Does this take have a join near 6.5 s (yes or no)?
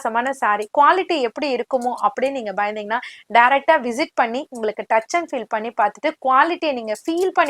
no